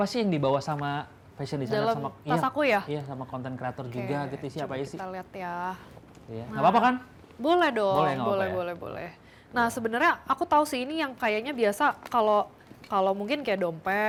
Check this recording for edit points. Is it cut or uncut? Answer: uncut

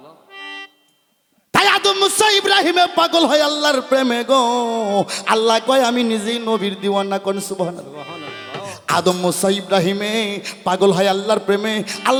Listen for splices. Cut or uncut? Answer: uncut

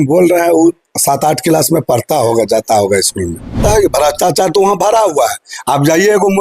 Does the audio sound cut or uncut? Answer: cut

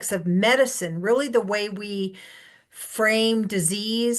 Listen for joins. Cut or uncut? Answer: uncut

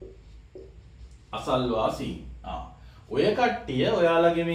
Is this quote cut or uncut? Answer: uncut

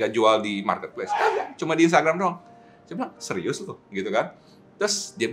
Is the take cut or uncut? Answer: uncut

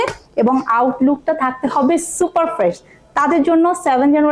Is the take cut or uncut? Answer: uncut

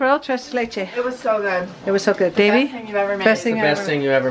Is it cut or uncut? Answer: uncut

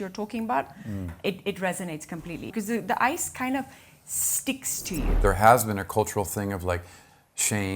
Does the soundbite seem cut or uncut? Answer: cut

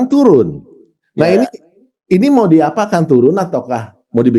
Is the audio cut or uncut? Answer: uncut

